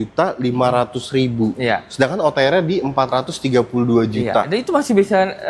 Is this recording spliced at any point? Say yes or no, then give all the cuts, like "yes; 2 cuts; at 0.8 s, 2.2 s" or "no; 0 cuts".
no; 0 cuts